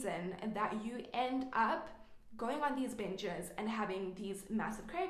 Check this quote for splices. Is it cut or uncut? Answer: uncut